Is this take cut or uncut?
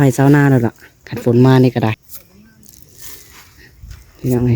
cut